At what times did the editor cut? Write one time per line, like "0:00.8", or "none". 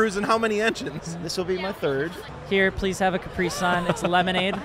0:02.2